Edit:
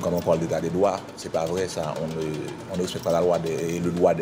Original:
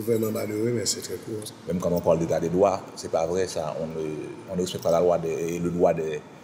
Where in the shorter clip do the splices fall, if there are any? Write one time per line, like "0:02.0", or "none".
none